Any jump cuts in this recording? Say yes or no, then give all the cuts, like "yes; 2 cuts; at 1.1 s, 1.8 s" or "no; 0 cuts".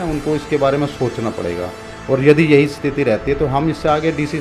no; 0 cuts